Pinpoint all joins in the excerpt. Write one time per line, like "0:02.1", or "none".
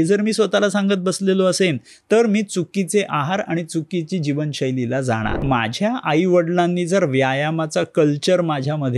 0:05.4